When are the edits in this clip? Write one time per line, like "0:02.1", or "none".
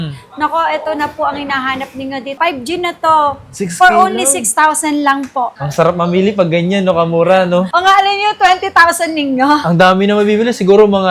0:02.4
0:05.6